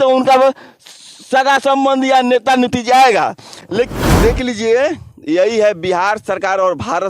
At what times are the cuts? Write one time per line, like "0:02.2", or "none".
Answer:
0:03.9